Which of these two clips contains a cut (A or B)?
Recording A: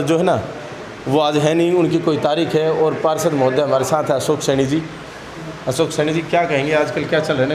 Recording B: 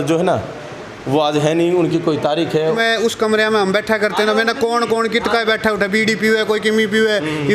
B